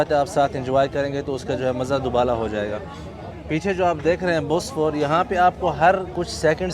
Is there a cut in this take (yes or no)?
no